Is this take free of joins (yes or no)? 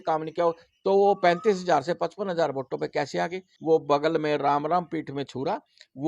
no